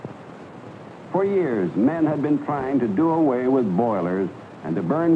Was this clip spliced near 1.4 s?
no; 1 cut; at 3.1 s

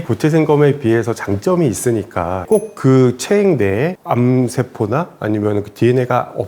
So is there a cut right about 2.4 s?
yes; 1 cut; at 2.4 s

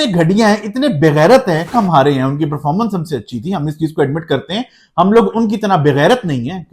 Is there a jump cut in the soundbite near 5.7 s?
no; 1 cut; at 1.6 s

